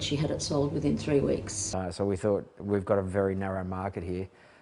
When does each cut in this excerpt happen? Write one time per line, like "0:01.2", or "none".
0:01.7